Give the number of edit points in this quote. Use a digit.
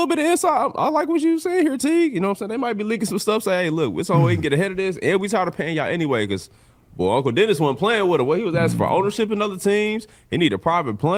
0